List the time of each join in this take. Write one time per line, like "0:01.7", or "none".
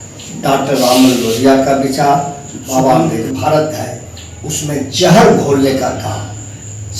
0:03.2